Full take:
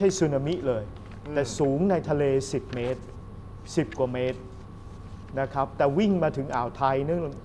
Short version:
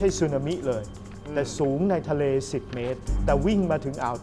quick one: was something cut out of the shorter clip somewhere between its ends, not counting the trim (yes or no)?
yes